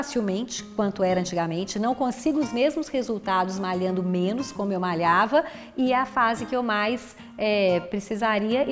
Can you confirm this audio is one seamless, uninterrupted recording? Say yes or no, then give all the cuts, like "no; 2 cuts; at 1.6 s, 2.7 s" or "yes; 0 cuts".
yes; 0 cuts